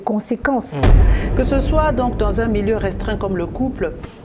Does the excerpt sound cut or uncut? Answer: cut